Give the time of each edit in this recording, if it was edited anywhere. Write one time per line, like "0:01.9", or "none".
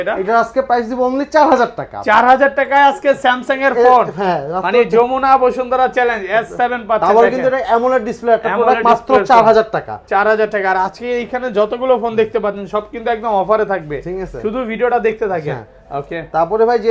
none